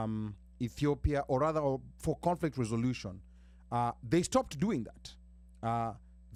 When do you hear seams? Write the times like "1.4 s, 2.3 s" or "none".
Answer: none